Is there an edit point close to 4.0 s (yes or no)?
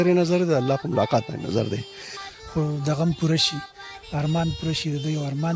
no